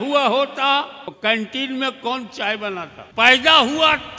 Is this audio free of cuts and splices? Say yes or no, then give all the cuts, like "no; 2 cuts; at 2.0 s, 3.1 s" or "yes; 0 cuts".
no; 2 cuts; at 1.2 s, 3.0 s